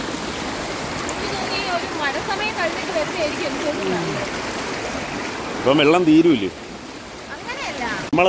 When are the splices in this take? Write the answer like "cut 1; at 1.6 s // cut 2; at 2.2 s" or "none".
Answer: none